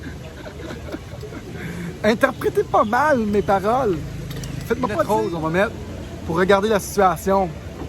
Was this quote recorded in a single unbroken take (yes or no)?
no